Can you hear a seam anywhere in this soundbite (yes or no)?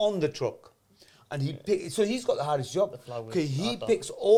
no